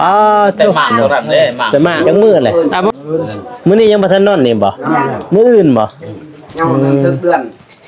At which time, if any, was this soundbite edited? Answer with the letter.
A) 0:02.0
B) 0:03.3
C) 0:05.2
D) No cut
A